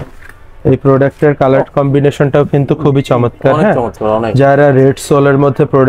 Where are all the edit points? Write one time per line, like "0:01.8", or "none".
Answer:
none